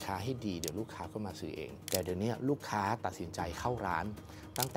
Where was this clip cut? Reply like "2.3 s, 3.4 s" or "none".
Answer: 1.7 s